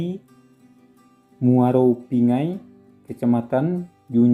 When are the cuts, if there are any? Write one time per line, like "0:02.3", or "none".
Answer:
none